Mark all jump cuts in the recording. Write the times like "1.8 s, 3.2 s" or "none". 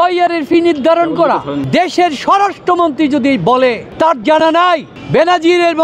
1.6 s, 3.9 s, 4.9 s